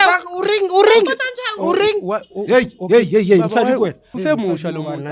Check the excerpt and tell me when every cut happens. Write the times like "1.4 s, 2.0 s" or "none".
4.1 s